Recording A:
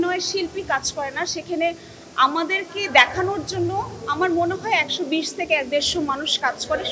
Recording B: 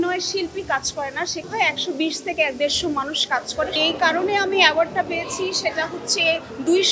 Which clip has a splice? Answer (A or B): B